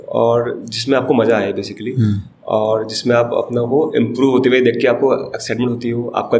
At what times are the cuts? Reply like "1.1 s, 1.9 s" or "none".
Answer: none